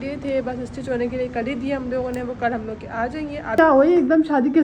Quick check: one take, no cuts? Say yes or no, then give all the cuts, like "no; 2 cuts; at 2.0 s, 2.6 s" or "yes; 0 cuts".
no; 1 cut; at 3.6 s